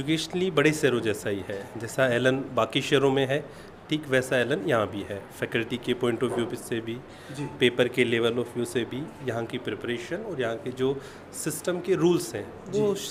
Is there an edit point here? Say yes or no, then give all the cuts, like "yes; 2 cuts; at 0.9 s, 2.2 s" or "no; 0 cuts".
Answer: no; 0 cuts